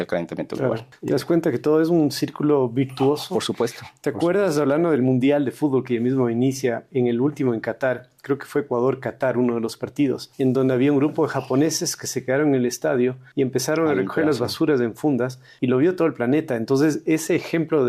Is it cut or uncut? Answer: cut